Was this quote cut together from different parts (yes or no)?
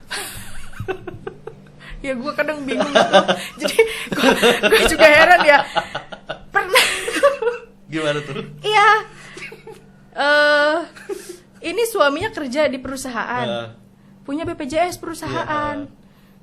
no